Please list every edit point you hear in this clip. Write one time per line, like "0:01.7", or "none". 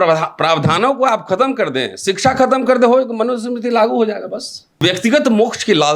0:04.8

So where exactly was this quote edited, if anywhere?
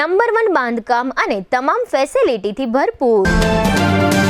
0:03.2

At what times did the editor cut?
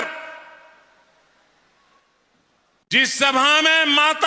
none

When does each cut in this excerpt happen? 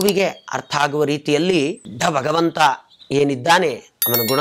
0:01.9

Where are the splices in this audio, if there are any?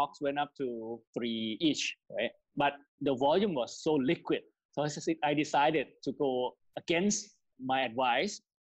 0:01.6
0:07.5

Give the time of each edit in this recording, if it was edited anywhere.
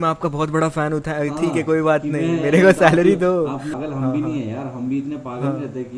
0:03.7

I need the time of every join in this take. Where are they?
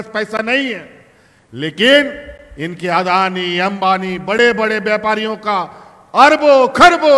none

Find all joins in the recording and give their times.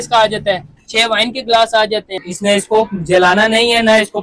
0:02.3

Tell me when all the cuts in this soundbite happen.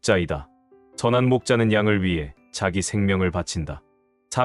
0:00.9

